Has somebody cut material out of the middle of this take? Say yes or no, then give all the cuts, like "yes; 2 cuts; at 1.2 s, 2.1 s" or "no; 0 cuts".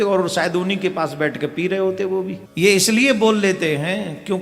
yes; 1 cut; at 2.4 s